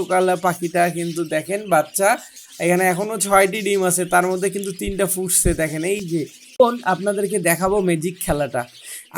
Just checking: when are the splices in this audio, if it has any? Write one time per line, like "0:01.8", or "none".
0:06.6